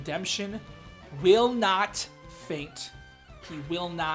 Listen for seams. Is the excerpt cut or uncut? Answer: uncut